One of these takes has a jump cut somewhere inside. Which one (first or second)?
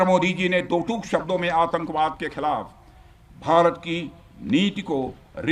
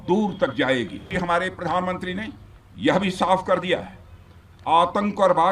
second